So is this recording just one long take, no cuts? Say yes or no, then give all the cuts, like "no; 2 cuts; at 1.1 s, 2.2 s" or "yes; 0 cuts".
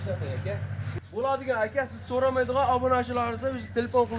no; 1 cut; at 0.9 s